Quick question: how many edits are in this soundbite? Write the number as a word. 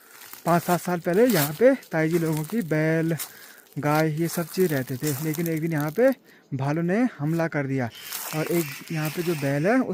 zero